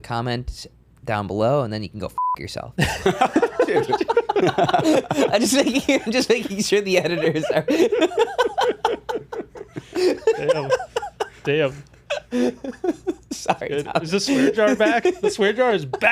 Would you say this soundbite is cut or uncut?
uncut